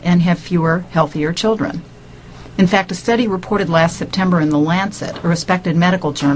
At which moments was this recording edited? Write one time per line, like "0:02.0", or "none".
0:03.7